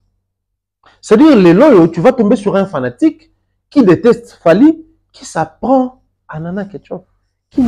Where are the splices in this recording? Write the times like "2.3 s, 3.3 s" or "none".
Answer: none